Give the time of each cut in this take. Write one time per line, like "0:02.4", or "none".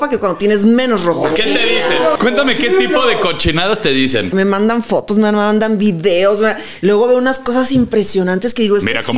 0:02.1
0:04.3

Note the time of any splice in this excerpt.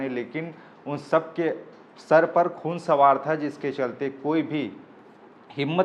none

